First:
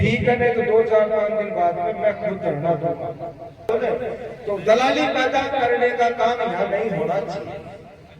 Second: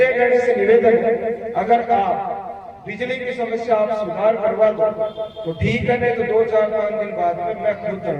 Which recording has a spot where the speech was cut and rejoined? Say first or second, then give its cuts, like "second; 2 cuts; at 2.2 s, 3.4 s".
first; 1 cut; at 3.7 s